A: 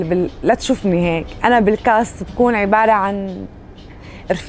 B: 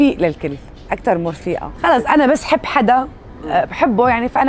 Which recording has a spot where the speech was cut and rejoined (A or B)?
B